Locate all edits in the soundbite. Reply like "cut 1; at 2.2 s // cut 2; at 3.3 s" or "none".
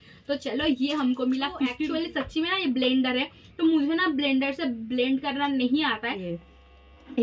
cut 1; at 1.7 s // cut 2; at 6.3 s